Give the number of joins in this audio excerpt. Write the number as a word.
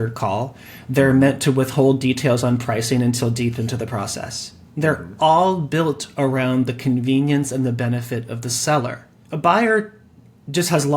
one